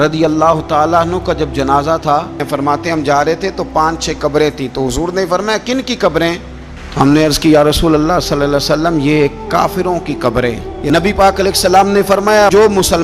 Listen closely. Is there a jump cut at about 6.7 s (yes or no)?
no